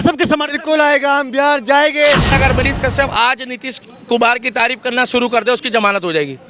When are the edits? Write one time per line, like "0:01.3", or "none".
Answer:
0:02.3

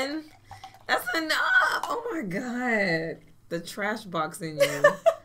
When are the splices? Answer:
0:03.3

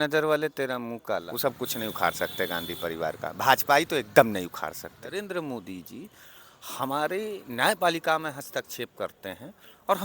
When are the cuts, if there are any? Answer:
0:01.3
0:05.1

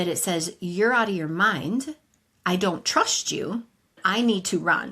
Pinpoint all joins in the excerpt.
0:04.0

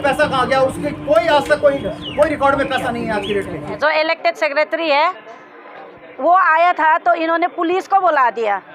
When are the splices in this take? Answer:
0:03.8

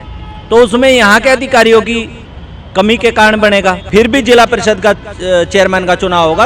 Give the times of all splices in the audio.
0:03.8

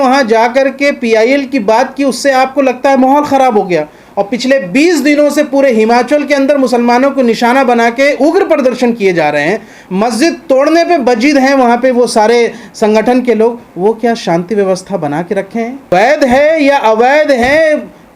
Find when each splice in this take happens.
0:15.9

